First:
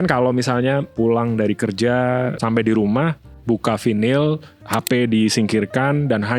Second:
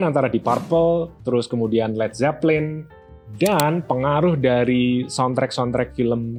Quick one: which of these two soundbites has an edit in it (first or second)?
first